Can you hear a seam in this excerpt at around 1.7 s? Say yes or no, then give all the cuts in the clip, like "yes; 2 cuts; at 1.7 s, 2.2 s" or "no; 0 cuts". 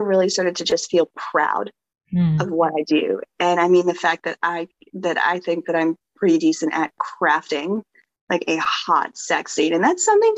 no; 0 cuts